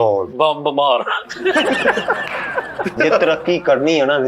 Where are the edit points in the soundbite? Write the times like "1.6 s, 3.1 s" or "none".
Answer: 2.9 s